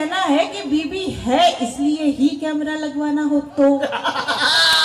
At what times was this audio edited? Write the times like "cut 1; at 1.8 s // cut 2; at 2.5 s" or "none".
none